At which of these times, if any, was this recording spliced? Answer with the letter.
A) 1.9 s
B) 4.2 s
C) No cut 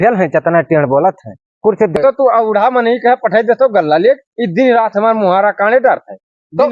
A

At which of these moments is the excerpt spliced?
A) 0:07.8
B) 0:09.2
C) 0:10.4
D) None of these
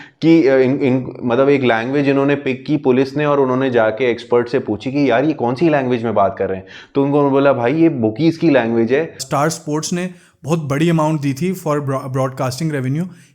B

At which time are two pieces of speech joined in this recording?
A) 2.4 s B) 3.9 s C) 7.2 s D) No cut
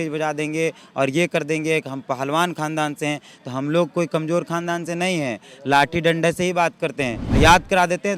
C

